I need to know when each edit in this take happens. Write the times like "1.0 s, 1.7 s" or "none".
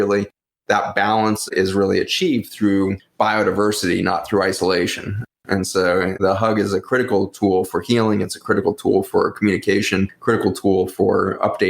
1.5 s, 6.2 s